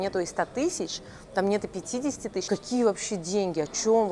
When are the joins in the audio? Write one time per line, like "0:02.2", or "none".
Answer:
0:02.5